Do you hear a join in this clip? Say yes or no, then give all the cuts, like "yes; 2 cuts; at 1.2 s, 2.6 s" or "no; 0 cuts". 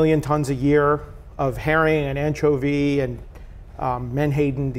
no; 0 cuts